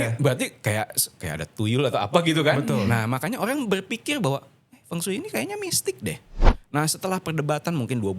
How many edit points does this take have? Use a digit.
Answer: 1